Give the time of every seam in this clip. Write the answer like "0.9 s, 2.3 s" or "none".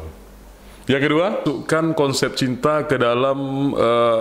1.4 s